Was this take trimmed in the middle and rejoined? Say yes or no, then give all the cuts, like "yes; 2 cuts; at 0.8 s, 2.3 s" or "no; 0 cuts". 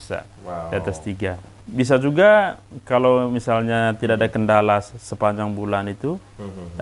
yes; 1 cut; at 1.6 s